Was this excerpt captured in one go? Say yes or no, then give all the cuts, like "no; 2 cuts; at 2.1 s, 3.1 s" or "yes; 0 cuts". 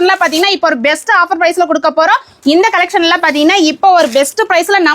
no; 1 cut; at 2.3 s